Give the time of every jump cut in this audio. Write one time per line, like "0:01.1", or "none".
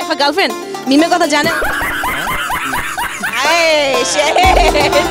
none

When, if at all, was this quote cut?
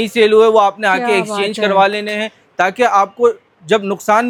none

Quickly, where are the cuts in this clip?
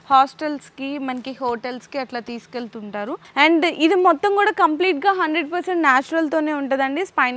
0:03.2

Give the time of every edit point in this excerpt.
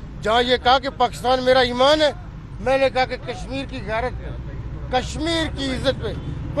none

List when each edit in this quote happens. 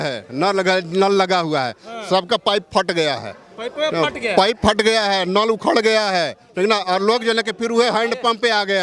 none

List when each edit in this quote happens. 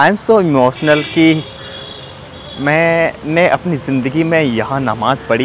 none

